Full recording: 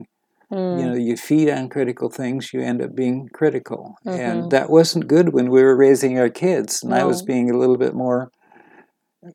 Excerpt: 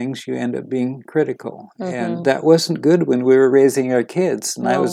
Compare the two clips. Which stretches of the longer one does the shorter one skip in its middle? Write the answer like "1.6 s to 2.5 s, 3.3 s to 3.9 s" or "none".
none